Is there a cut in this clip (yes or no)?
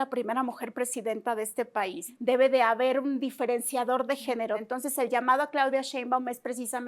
yes